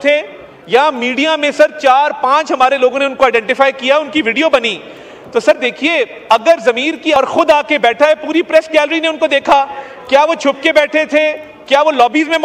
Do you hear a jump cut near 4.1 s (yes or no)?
no